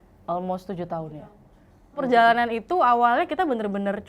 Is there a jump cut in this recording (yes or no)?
yes